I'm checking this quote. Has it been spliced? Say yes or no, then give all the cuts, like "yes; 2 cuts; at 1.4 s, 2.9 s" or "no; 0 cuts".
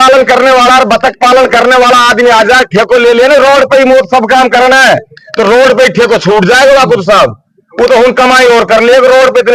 no; 0 cuts